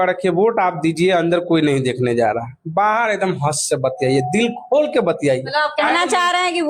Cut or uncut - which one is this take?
uncut